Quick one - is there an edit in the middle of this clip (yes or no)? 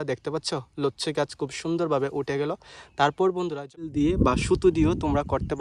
yes